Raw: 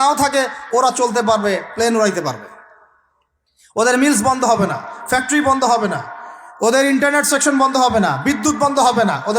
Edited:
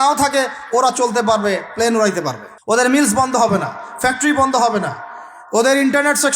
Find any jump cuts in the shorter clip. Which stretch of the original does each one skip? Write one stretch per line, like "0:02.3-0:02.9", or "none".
0:02.5-0:03.6